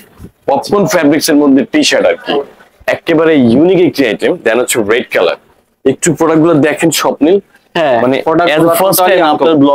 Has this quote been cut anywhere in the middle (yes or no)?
no